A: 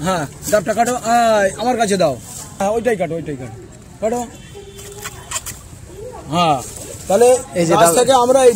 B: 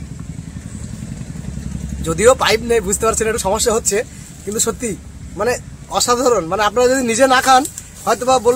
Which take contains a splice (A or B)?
A